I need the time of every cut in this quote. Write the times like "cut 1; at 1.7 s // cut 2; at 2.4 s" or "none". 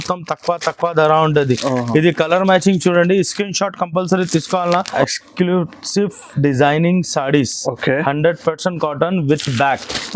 cut 1; at 4.9 s